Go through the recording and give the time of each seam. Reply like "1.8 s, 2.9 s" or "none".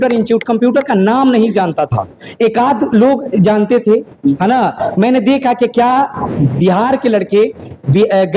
none